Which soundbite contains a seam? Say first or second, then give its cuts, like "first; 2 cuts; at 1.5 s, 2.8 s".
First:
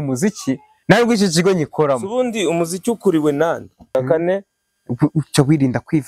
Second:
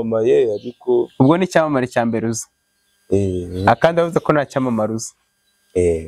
first; 1 cut; at 3.9 s